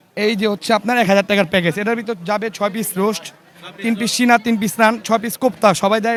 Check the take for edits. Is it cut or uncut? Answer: uncut